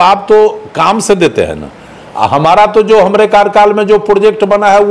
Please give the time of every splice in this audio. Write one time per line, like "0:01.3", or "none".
none